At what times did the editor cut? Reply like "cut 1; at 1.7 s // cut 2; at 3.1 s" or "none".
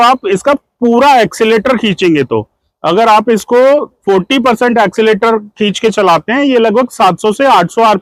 none